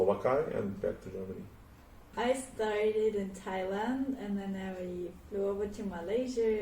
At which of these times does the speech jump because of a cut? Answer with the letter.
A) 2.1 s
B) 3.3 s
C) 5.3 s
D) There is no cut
A